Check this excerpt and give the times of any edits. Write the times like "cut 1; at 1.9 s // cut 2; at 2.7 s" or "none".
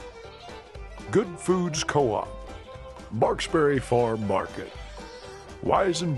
cut 1; at 1.1 s